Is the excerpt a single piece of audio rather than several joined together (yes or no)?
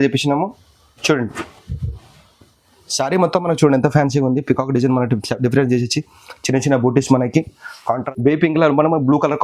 no